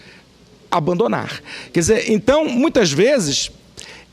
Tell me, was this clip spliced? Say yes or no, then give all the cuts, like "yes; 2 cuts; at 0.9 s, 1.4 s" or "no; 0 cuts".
no; 0 cuts